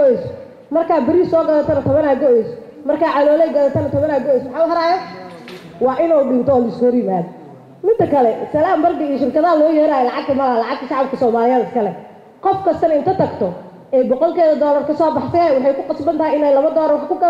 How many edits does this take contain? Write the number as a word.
zero